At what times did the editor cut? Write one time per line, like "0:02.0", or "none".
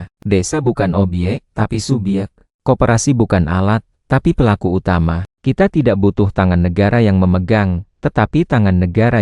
none